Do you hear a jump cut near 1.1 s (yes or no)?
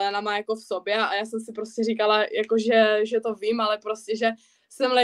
no